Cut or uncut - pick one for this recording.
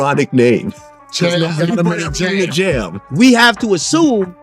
cut